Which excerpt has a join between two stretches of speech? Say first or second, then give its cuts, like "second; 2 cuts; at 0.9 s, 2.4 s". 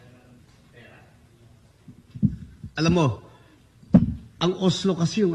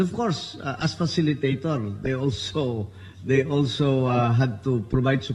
second; 1 cut; at 4.2 s